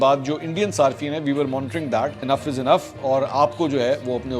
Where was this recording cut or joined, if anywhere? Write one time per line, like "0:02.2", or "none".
0:02.2